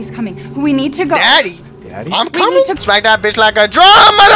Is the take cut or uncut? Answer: cut